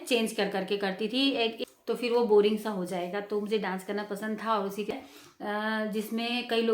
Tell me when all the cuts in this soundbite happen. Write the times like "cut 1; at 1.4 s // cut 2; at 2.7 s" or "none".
cut 1; at 1.6 s // cut 2; at 4.9 s